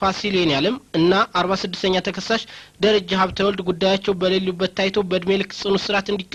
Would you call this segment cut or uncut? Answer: uncut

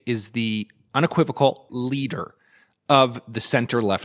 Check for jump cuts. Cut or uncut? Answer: cut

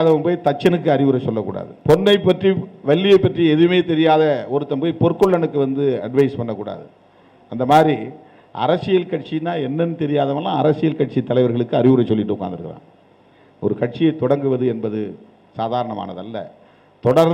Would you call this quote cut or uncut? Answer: cut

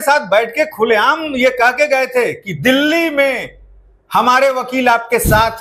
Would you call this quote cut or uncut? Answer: uncut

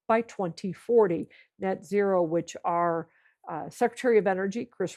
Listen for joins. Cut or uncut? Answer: uncut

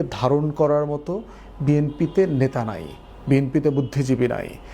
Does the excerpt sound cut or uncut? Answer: uncut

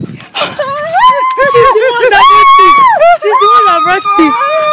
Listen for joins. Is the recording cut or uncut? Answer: uncut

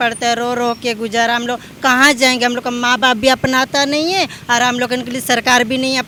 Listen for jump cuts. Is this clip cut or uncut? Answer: uncut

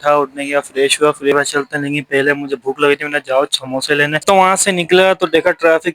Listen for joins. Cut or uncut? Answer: cut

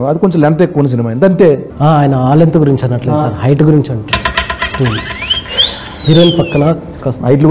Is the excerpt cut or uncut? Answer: uncut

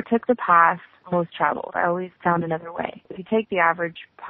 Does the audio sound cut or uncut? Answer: cut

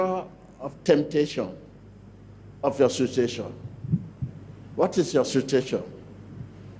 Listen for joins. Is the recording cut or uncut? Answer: uncut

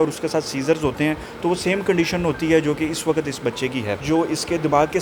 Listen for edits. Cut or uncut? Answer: cut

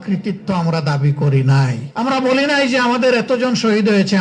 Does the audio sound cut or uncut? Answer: cut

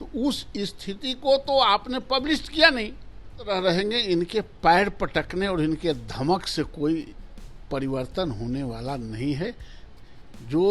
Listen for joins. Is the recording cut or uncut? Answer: cut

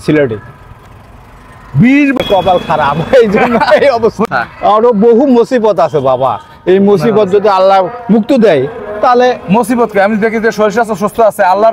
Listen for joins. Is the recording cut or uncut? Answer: cut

